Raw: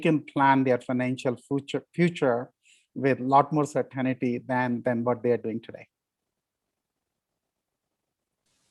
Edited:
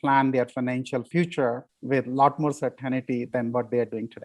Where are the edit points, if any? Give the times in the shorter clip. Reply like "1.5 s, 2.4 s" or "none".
1.1 s, 1.7 s, 3.2 s

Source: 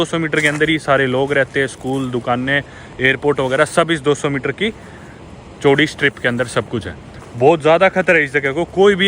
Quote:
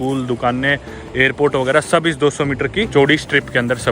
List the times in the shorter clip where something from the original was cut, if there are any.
2.9 s

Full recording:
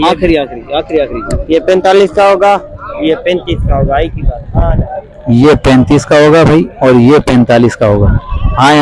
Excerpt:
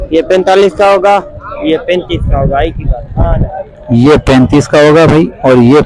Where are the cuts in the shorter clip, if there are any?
none

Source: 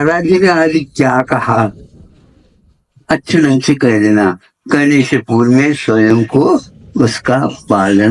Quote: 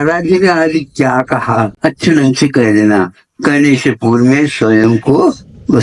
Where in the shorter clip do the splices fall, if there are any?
1.7 s

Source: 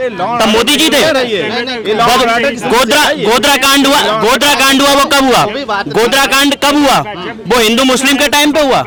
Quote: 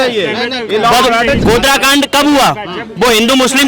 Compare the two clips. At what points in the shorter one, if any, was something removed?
1.4 s

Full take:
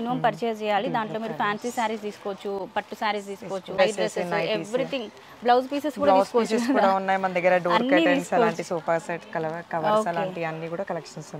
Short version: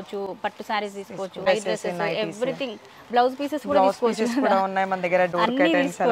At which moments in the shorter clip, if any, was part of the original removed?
none

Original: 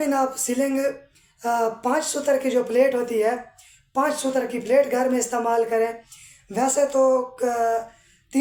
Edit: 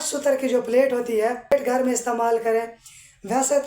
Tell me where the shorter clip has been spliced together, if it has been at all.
1.6 s

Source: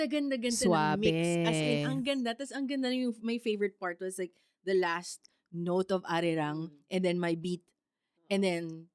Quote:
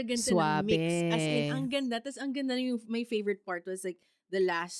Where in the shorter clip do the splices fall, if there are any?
none

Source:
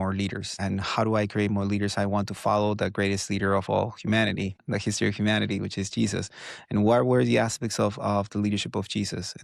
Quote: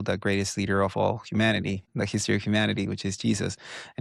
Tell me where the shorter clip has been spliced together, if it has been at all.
none

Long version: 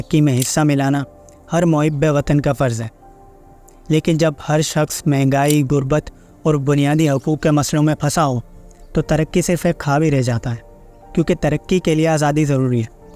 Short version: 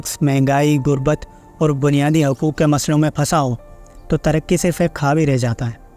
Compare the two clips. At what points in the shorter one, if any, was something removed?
none

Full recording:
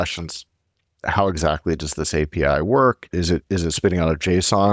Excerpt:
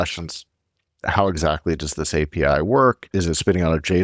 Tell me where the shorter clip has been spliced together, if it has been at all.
3.1 s

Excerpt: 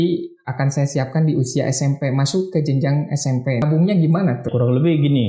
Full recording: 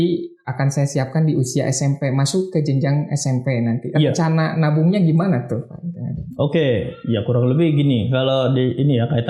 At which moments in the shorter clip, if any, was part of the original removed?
3.6 s, 4.5 s

